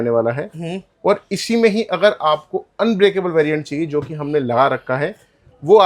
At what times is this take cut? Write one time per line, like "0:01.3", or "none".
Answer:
none